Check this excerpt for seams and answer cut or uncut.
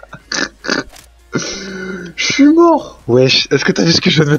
cut